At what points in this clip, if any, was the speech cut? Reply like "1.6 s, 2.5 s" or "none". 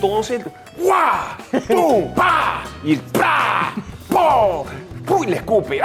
none